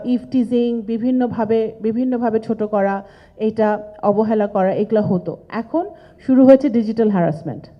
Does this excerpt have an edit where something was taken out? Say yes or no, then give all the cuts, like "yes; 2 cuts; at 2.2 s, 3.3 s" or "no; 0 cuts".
no; 0 cuts